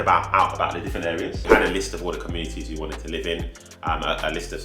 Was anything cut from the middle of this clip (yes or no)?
yes